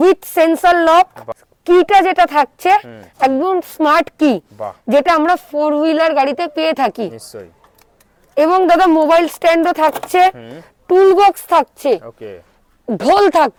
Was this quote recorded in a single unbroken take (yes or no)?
yes